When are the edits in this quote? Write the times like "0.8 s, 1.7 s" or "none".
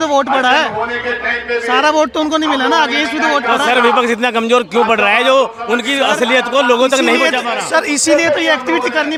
none